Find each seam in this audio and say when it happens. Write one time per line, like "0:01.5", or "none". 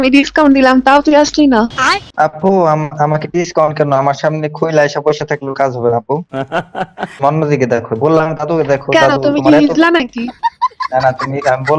0:01.8